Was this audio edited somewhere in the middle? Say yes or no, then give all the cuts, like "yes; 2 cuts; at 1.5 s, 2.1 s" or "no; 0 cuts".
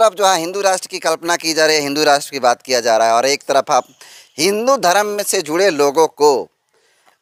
no; 0 cuts